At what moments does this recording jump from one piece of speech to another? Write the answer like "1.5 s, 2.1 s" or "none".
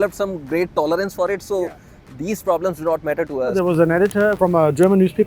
3.5 s, 4.3 s